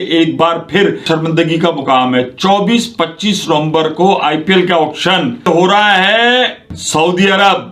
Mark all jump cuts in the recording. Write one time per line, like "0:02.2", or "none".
0:01.0
0:05.4
0:06.7